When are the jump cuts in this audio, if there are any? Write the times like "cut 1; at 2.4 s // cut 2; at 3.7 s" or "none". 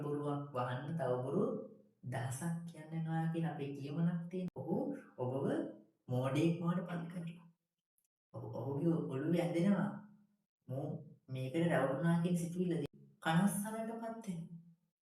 cut 1; at 4.6 s // cut 2; at 12.9 s